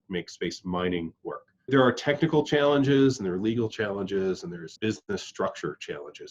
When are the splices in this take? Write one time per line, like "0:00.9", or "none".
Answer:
0:01.7
0:04.7